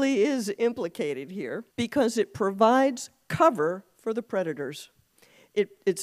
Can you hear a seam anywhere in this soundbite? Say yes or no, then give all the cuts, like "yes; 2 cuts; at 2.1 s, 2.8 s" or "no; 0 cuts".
yes; 1 cut; at 1.6 s